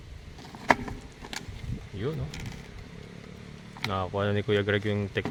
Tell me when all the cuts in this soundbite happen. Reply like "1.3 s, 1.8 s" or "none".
none